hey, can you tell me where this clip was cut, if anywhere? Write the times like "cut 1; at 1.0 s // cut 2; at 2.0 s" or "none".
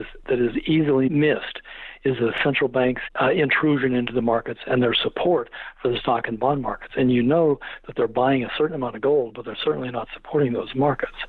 cut 1; at 1.1 s // cut 2; at 3.0 s